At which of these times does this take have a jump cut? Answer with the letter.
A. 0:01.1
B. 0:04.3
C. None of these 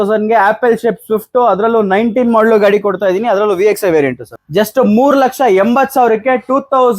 B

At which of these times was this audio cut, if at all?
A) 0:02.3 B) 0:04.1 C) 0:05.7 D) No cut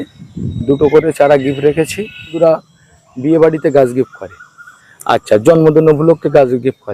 A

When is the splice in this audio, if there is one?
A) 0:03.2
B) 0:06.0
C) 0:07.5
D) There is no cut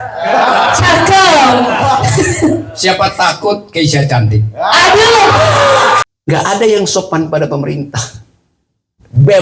B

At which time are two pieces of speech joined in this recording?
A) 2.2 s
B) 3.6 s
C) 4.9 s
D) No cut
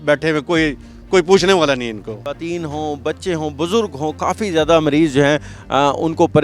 A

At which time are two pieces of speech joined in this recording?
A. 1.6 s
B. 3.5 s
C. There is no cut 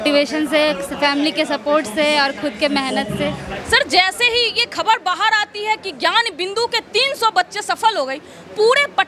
B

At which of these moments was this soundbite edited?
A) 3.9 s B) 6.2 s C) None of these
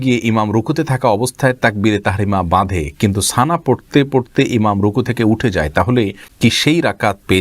B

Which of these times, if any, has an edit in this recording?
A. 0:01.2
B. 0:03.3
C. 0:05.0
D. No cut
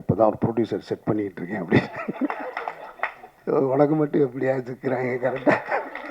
B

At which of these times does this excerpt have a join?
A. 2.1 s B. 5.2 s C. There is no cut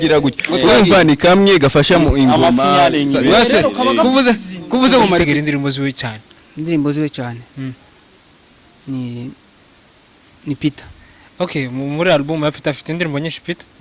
B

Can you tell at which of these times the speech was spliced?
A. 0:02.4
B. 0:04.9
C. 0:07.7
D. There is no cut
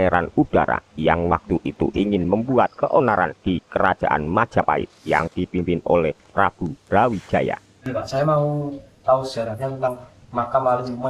C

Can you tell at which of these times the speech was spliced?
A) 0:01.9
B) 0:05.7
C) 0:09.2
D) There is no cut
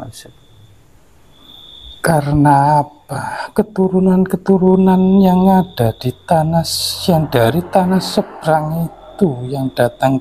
A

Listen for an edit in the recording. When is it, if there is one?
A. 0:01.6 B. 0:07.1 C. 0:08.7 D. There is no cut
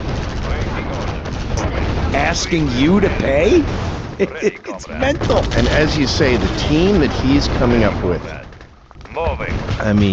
A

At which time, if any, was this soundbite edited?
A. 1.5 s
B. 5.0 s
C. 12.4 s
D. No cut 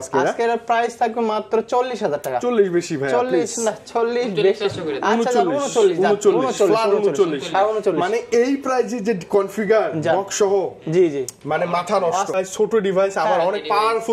C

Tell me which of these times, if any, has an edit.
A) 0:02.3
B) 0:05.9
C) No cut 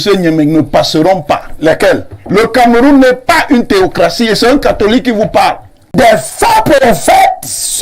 B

